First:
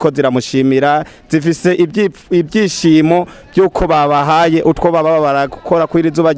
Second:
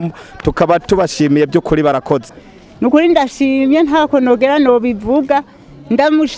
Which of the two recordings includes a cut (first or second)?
second